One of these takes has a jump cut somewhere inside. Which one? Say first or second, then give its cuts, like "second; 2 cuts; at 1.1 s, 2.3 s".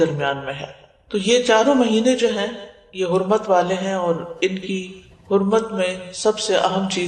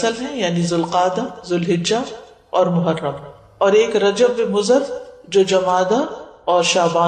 second; 1 cut; at 3.9 s